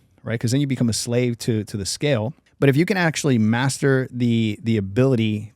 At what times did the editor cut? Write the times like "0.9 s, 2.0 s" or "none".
2.4 s

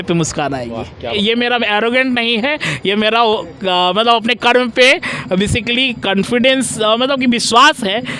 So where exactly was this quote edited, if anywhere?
1.1 s

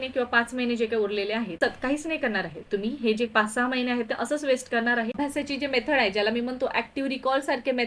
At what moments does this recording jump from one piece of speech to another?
1.6 s, 5.1 s

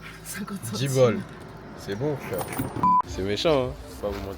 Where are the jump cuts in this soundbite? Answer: 3.0 s

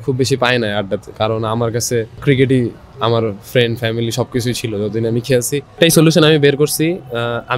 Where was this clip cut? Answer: 1.1 s, 2.1 s, 5.8 s

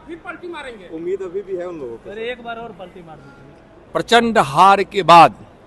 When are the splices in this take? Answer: 3.8 s

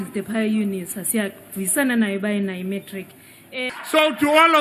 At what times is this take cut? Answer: 3.6 s

